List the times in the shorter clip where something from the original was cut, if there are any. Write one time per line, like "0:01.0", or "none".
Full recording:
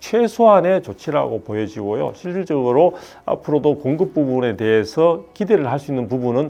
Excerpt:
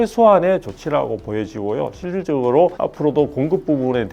0:02.8